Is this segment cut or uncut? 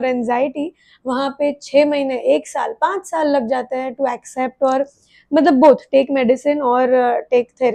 uncut